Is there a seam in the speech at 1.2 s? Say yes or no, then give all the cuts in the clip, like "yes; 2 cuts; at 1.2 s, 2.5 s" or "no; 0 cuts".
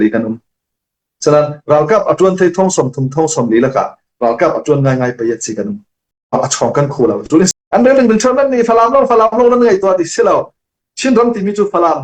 no; 1 cut; at 7.5 s